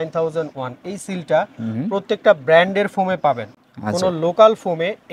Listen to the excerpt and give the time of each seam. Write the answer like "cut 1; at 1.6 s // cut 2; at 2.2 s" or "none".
none